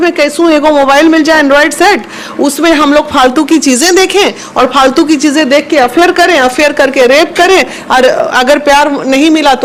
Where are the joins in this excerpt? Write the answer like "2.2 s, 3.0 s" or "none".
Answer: none